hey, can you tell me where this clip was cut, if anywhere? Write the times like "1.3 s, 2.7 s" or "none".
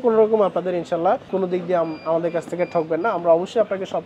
1.3 s